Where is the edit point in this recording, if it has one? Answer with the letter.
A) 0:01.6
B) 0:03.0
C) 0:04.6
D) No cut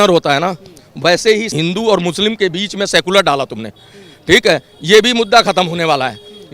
A